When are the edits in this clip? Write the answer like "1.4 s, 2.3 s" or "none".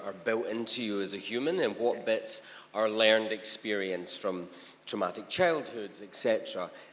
none

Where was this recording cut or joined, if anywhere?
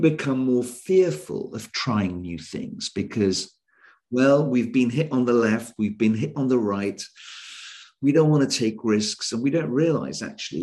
6.3 s

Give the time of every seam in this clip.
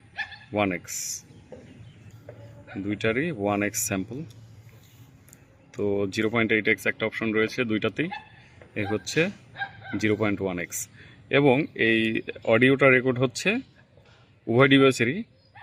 2.1 s

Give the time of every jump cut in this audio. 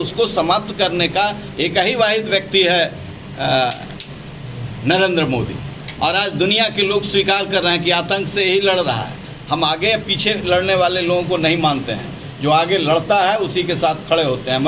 none

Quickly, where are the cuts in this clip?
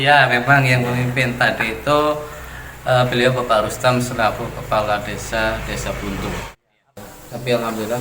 6.6 s

